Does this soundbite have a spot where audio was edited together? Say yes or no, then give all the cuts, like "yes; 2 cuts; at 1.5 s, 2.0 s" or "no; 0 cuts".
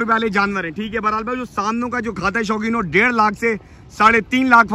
no; 0 cuts